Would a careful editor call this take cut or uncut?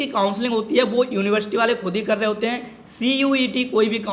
uncut